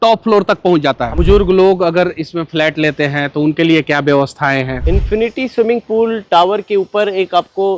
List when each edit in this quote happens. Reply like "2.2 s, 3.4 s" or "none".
1.1 s, 4.8 s